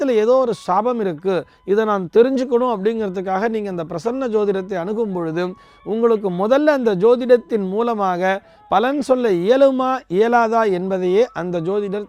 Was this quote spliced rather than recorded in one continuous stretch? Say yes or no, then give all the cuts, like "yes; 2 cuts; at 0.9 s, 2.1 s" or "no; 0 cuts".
no; 0 cuts